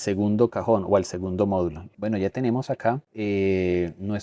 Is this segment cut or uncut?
cut